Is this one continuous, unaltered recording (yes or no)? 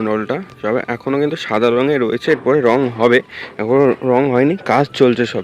yes